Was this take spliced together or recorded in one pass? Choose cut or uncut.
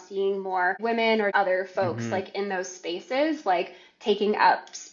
cut